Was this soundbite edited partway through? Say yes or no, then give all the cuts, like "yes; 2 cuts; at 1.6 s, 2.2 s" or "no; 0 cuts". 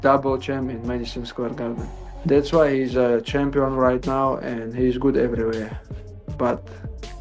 yes; 1 cut; at 1.9 s